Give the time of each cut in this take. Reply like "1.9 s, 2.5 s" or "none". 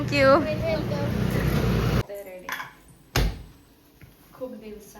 2.0 s

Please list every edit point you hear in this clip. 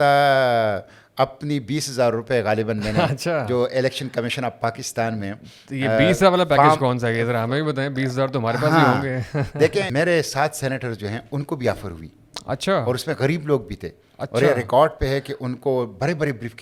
none

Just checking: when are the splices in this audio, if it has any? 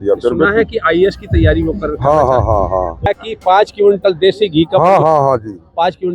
3.1 s

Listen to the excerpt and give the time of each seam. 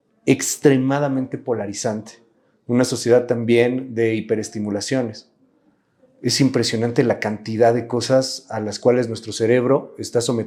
none

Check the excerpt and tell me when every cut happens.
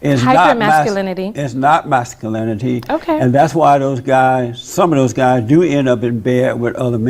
none

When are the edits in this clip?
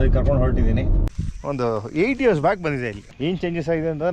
1.0 s, 3.0 s

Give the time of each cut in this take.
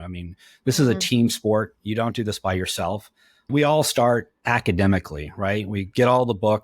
4.3 s

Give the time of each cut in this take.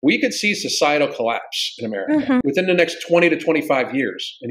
2.4 s

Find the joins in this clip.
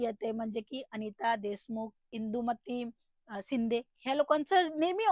2.0 s

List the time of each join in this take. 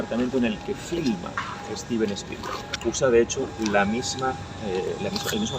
2.7 s

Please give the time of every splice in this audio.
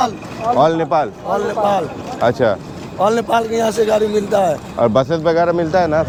none

